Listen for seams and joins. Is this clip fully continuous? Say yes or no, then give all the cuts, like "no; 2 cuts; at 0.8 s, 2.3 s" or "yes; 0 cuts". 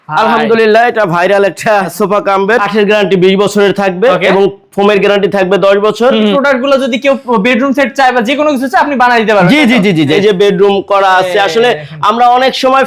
no; 3 cuts; at 2.4 s, 6.3 s, 10.1 s